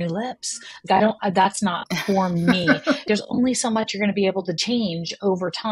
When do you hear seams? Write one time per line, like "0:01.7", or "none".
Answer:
0:03.0